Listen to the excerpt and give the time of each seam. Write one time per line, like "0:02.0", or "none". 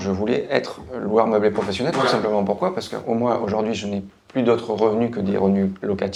none